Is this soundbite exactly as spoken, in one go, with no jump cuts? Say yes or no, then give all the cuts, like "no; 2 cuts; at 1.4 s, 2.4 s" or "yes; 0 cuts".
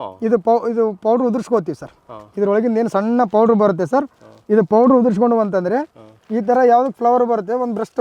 yes; 0 cuts